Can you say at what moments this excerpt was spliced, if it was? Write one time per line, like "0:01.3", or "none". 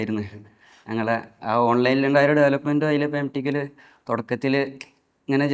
none